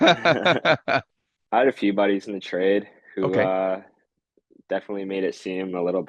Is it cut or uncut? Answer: cut